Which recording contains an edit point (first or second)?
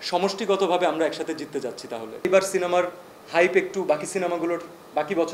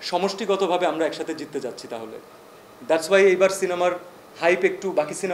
first